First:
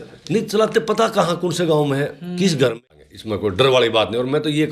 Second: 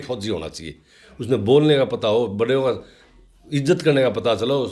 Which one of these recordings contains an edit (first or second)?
first